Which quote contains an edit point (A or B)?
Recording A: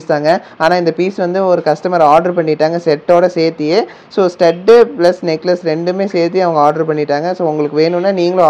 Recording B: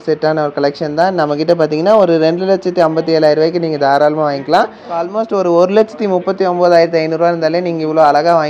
B